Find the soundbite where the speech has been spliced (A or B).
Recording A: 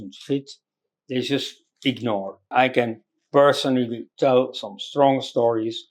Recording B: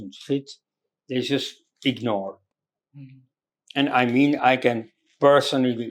A